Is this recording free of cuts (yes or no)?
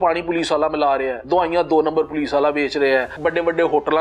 no